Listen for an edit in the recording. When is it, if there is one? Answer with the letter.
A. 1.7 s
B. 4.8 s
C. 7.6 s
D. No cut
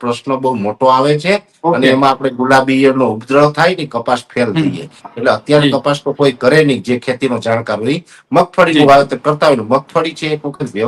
D